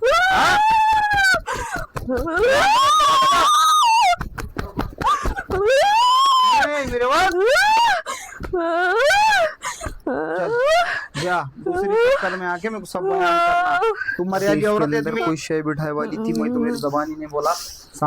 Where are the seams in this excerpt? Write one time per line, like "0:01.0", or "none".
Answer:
0:15.0